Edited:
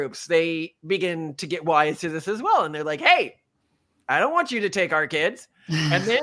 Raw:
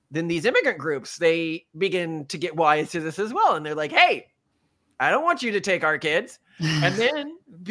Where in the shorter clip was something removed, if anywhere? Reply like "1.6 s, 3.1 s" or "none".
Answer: none